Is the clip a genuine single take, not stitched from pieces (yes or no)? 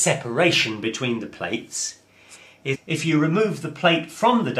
yes